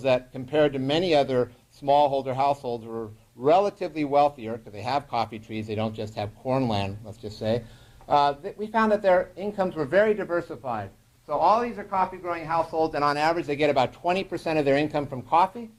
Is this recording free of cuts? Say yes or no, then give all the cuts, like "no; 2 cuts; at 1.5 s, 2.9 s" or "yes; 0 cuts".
yes; 0 cuts